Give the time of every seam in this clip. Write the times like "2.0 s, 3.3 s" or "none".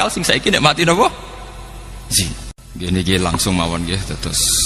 2.6 s